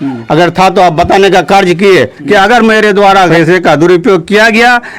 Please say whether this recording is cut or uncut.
cut